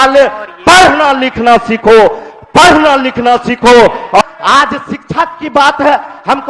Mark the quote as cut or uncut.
cut